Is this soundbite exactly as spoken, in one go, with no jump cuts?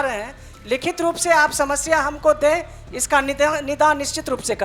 yes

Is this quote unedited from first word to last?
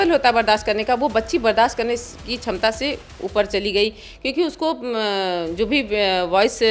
yes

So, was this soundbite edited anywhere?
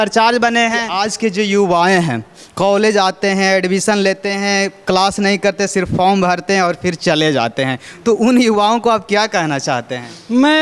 yes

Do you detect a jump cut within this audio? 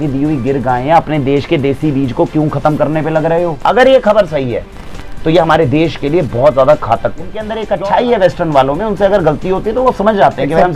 yes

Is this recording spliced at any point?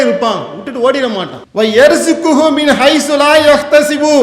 no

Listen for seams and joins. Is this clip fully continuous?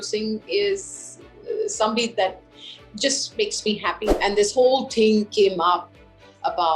no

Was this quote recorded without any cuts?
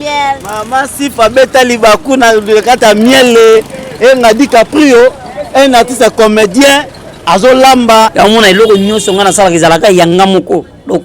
no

